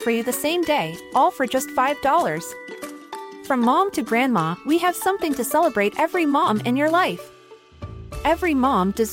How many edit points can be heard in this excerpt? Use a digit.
0